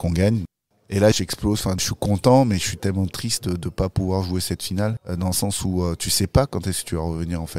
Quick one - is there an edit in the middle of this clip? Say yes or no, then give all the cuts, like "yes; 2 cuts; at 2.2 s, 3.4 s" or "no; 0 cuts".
yes; 1 cut; at 5.0 s